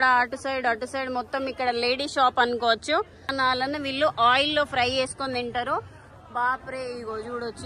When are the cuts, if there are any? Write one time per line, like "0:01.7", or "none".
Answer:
0:03.3